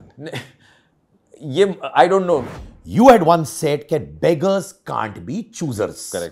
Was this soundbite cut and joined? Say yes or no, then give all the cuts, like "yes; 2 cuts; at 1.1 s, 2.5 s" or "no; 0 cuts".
yes; 1 cut; at 2.6 s